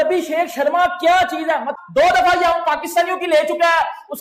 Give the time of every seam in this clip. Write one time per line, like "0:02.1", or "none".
0:01.8